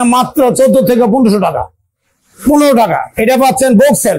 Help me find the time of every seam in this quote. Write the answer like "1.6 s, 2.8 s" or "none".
none